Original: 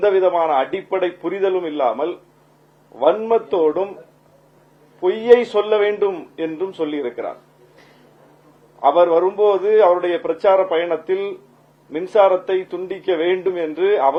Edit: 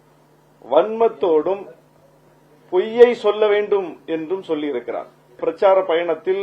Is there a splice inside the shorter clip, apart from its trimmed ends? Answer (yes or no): yes